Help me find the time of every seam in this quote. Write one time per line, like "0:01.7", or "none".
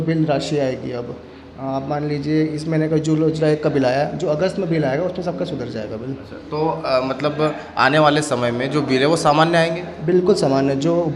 none